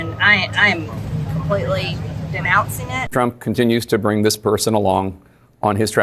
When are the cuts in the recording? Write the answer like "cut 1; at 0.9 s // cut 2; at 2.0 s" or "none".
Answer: cut 1; at 3.0 s